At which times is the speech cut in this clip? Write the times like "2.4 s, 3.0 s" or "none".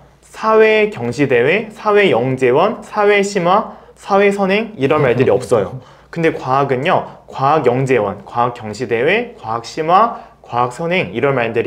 none